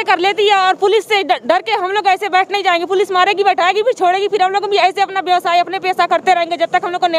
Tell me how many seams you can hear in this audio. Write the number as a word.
zero